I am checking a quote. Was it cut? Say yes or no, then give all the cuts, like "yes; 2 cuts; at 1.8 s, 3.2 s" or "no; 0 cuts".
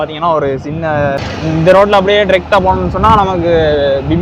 yes; 1 cut; at 1.2 s